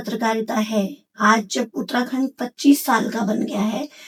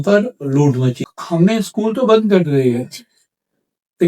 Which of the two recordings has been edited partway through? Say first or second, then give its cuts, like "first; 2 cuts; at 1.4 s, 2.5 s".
second; 1 cut; at 1.0 s